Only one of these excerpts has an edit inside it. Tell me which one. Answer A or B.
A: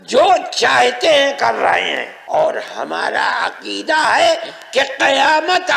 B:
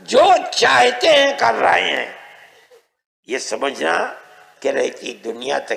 A